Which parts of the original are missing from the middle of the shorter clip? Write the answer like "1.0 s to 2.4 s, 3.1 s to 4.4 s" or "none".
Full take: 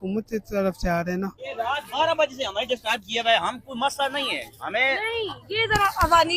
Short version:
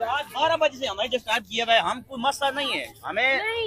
none